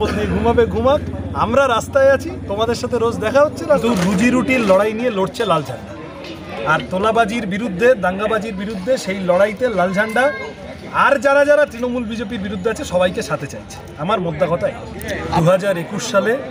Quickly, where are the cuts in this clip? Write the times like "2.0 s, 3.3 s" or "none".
3.8 s, 15.4 s